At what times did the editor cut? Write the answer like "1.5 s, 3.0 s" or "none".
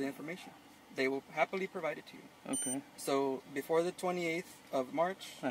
none